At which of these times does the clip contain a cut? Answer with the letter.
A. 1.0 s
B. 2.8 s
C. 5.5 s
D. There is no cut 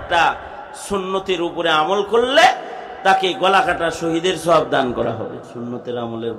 C